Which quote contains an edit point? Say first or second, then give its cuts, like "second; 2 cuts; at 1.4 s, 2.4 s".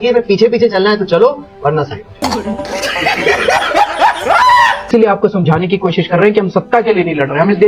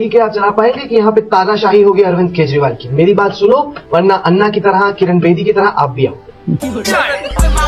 first; 2 cuts; at 2.1 s, 4.9 s